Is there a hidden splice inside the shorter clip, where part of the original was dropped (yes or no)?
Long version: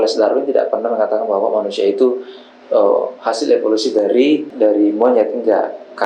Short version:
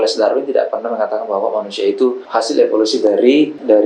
yes